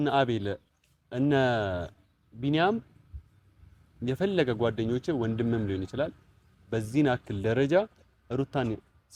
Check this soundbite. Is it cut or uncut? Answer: uncut